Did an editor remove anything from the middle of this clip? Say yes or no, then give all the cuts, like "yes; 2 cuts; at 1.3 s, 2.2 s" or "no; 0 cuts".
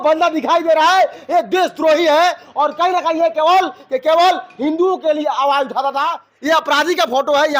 yes; 1 cut; at 6.2 s